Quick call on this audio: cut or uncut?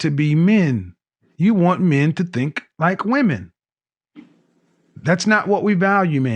uncut